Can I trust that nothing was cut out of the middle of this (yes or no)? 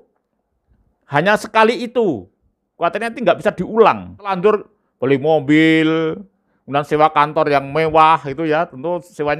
no